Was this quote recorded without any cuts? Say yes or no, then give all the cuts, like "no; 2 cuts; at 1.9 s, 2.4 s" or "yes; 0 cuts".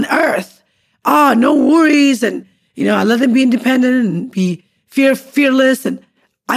yes; 0 cuts